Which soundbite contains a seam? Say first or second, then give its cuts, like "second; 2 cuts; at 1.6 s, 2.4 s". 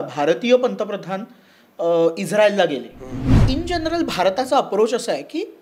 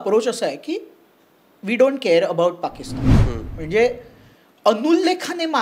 first; 1 cut; at 3.4 s